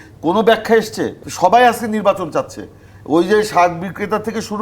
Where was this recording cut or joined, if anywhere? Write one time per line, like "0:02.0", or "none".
0:01.2